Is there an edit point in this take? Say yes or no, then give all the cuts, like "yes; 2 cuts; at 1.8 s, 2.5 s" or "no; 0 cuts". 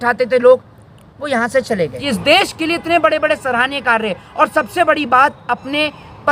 yes; 1 cut; at 2.0 s